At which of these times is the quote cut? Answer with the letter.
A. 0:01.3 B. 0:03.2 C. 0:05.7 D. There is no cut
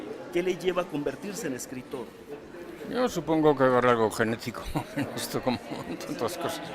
B